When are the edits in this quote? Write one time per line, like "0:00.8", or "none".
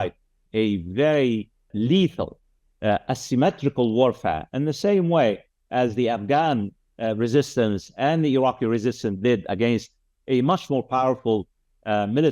0:01.7